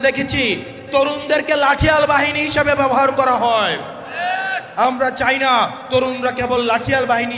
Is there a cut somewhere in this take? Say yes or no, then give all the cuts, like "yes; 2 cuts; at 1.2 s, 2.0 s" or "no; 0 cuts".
no; 0 cuts